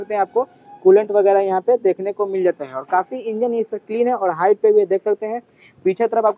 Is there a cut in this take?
no; 0 cuts

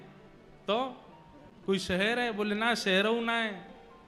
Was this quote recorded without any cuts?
no; 1 cut; at 1.7 s

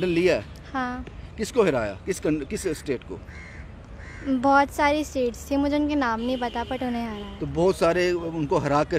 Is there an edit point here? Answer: no; 0 cuts

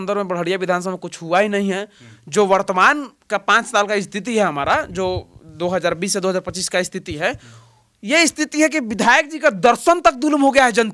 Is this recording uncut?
yes; 0 cuts

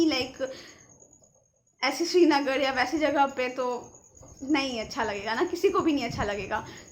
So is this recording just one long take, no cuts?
yes; 0 cuts

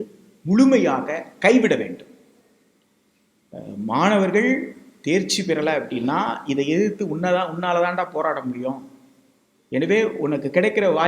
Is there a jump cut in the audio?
no; 0 cuts

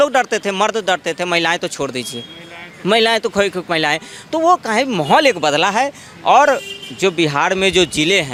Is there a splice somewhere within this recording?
no; 0 cuts

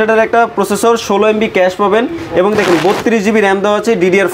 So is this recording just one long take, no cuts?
yes; 0 cuts

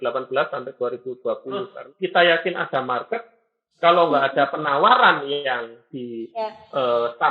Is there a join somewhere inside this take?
yes; 1 cut; at 1.8 s

